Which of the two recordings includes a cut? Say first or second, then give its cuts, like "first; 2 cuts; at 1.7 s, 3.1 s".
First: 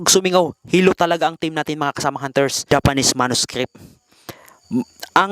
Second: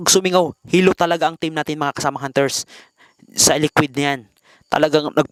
first; 1 cut; at 2.6 s